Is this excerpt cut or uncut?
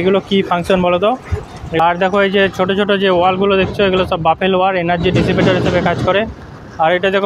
cut